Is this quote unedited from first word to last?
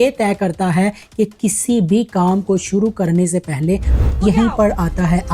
no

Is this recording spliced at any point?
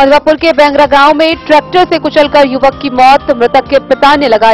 no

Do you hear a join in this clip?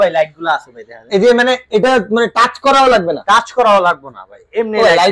no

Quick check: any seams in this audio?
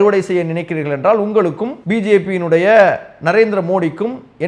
yes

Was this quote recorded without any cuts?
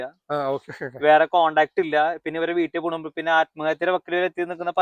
yes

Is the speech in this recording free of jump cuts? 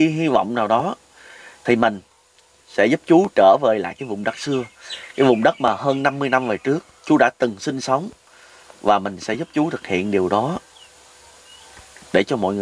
yes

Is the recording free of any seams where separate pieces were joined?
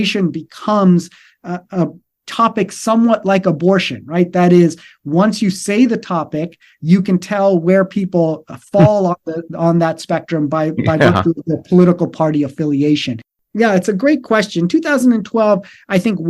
no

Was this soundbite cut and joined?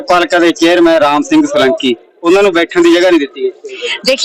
no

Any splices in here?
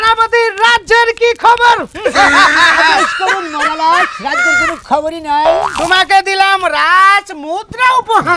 no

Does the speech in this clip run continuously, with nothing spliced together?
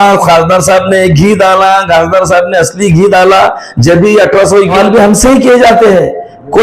no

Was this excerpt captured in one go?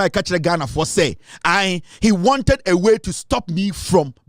yes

